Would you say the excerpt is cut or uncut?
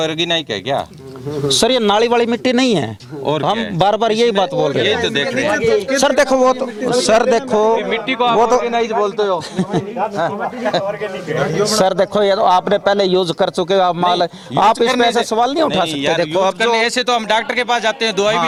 uncut